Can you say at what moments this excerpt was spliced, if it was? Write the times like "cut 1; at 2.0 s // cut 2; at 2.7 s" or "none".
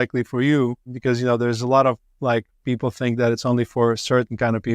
cut 1; at 0.9 s